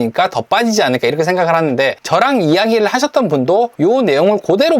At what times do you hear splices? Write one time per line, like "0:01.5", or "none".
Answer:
0:02.0
0:03.7